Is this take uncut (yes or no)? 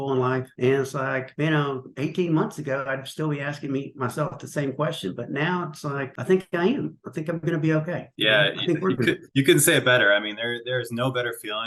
yes